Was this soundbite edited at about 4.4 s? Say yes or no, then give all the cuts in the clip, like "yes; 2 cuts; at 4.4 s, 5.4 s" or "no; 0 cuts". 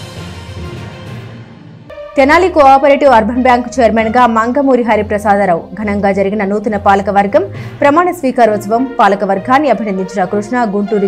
no; 1 cut; at 2.1 s